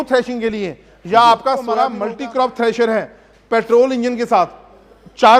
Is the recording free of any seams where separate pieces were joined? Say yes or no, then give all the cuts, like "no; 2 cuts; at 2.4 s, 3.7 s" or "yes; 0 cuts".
no; 1 cut; at 1.9 s